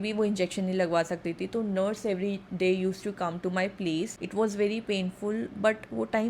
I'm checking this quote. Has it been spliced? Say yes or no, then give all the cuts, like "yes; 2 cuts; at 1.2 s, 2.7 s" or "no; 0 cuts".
yes; 1 cut; at 4.1 s